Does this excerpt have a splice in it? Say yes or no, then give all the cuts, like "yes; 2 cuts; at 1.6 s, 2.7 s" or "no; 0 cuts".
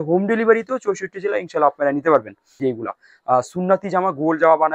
yes; 1 cut; at 2.6 s